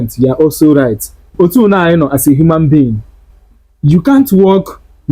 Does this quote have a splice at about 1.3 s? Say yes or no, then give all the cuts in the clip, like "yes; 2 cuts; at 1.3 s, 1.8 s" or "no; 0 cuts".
yes; 1 cut; at 1.3 s